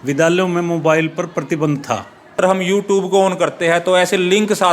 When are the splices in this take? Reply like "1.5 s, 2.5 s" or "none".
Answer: 2.4 s